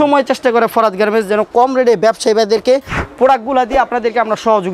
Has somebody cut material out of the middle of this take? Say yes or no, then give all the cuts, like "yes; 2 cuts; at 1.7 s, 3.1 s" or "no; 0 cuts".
no; 0 cuts